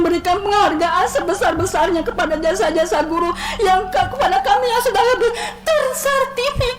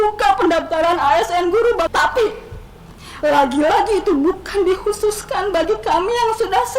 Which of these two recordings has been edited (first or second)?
second